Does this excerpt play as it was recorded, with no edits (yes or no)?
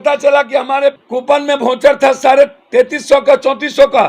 no